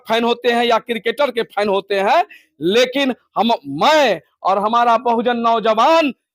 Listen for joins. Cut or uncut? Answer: uncut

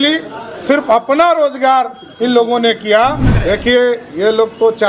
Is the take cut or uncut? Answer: cut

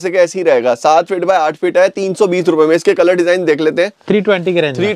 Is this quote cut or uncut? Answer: uncut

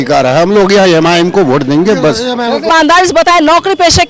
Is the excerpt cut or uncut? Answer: cut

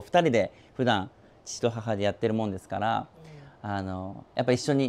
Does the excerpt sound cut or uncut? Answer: uncut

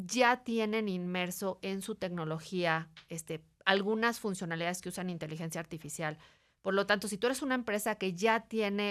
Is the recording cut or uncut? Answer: uncut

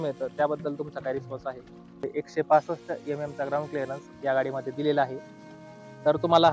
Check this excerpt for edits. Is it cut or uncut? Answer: cut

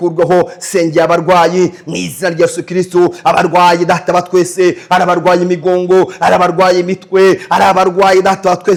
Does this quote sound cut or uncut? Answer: uncut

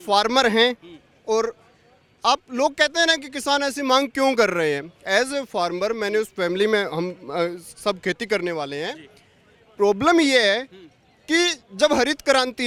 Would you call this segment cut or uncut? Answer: uncut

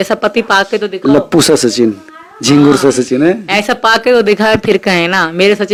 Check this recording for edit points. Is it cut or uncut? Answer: uncut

